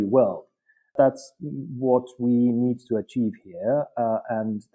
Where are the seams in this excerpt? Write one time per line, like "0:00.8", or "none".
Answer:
0:00.9